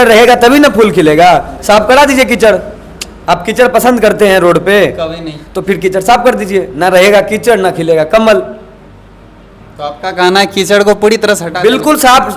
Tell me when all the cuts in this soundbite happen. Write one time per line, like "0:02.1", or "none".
none